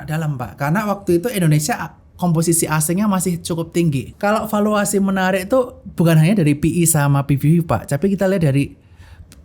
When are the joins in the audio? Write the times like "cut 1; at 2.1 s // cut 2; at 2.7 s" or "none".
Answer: cut 1; at 4.1 s